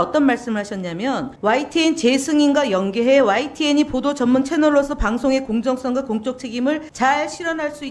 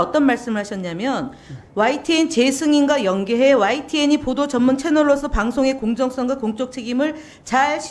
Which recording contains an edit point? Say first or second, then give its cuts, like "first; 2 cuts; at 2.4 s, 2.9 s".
first; 2 cuts; at 1.3 s, 6.9 s